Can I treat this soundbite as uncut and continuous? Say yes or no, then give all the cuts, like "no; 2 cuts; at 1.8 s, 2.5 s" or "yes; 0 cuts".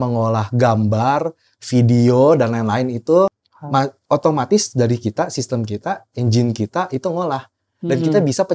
no; 1 cut; at 3.4 s